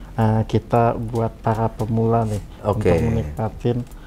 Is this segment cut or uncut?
uncut